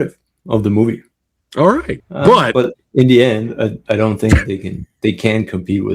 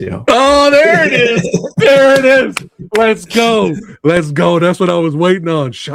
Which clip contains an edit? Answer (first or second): first